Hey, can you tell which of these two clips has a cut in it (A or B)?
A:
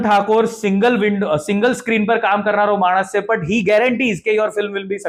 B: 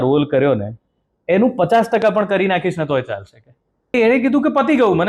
B